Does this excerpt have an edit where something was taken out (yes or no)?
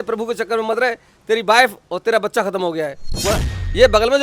yes